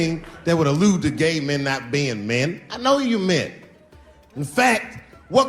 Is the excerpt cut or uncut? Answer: uncut